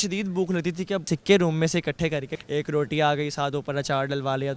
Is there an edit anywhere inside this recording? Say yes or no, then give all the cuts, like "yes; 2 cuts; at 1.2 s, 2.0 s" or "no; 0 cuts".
yes; 2 cuts; at 1.1 s, 2.3 s